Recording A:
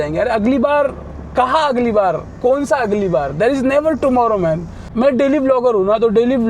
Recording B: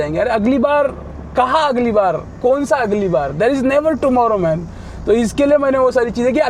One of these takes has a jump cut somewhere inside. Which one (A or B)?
A